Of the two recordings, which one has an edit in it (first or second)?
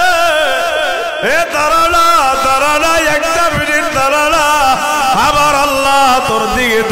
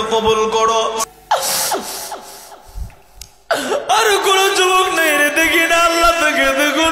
second